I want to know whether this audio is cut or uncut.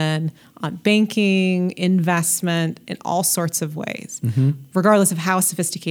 uncut